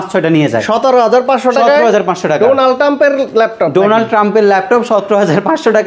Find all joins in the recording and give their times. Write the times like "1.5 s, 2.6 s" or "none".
none